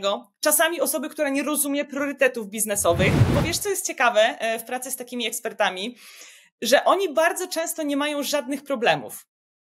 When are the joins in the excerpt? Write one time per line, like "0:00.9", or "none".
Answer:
0:03.2